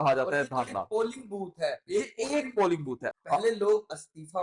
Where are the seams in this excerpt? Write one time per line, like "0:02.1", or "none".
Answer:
0:03.0